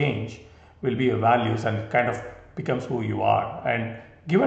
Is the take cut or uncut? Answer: uncut